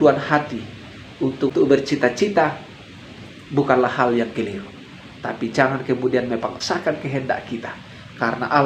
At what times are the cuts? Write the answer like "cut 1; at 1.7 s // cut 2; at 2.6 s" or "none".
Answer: cut 1; at 1.5 s // cut 2; at 6.6 s